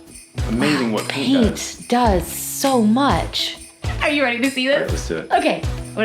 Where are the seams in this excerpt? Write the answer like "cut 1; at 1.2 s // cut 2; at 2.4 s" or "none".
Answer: cut 1; at 3.8 s